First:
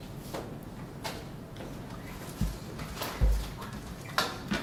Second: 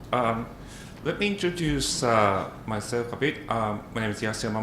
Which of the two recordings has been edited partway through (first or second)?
second